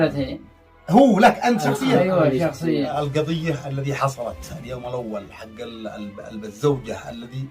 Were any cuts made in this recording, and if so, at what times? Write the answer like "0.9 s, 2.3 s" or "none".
2.9 s